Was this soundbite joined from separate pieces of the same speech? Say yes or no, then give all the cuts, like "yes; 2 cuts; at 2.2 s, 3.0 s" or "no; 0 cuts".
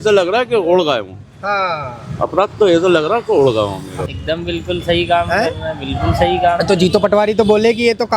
yes; 1 cut; at 4.0 s